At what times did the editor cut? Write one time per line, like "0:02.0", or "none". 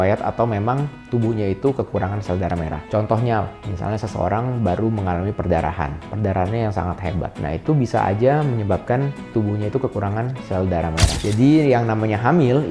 0:11.2